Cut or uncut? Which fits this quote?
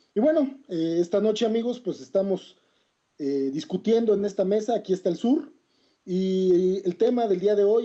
cut